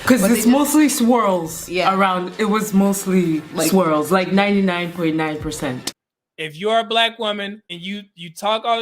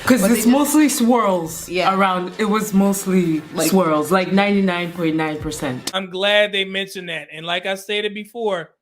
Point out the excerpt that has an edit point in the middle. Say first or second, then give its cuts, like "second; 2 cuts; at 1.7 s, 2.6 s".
first; 2 cuts; at 5.8 s, 7.7 s